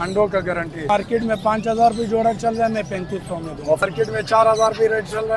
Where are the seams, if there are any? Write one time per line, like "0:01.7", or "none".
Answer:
0:00.9
0:03.8